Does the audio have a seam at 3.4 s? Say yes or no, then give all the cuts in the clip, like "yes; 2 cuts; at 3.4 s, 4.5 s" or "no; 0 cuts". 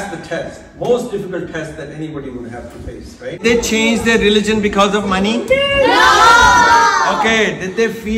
yes; 1 cut; at 3.4 s